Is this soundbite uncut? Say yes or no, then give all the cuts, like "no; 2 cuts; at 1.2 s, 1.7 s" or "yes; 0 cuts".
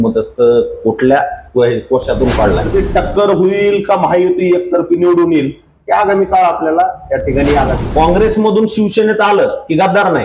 no; 2 cuts; at 2.7 s, 7.8 s